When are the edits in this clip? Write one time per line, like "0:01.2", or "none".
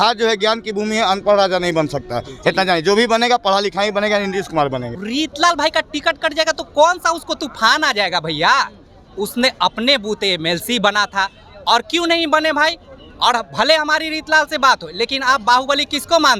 0:05.0